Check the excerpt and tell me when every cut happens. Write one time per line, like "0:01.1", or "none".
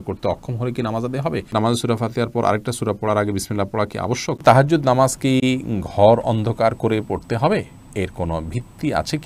0:01.5
0:04.4

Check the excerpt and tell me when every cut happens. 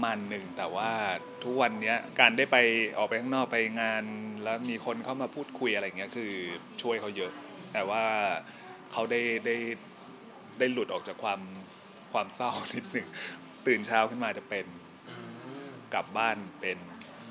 0:02.1

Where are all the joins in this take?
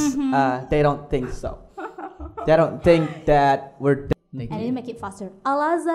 0:04.1

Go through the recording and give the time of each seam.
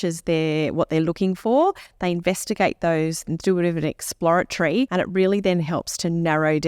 0:04.9

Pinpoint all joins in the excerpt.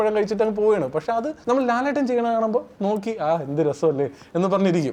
0:01.3

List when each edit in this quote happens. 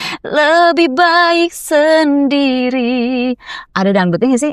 none

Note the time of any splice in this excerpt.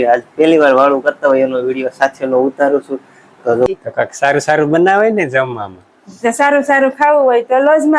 0:03.7

